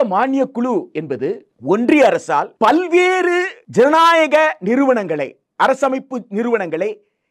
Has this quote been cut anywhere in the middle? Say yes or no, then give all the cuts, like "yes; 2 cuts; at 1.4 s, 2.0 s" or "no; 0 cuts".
yes; 3 cuts; at 1.5 s, 2.5 s, 3.6 s